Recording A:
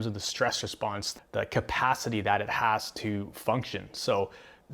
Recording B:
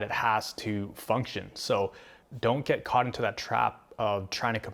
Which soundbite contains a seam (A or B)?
A